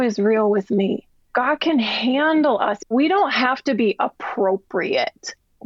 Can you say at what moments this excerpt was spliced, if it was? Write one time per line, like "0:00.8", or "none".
0:01.2
0:02.9

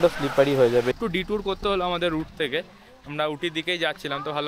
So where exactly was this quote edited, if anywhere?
0:00.9

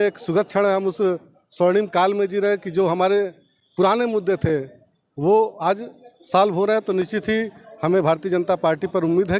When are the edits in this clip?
none

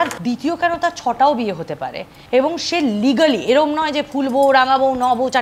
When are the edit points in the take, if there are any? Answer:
0:02.1

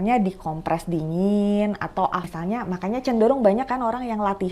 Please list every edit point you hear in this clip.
0:02.3

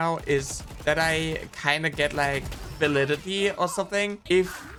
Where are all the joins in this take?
none

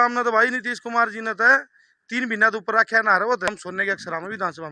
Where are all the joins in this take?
0:03.6

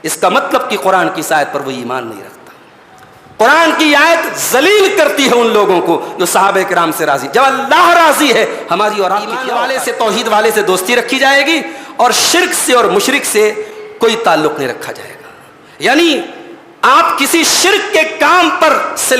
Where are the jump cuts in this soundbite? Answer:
0:09.4

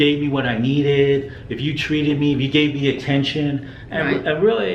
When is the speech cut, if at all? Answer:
none

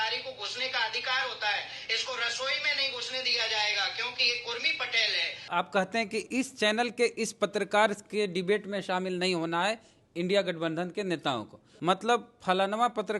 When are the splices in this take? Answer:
0:05.4
0:11.6

